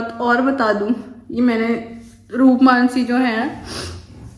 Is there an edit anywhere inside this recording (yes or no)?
no